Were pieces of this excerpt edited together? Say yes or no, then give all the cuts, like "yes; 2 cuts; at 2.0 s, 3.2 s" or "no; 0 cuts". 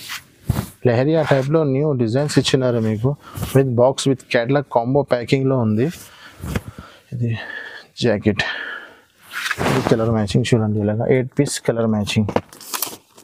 no; 0 cuts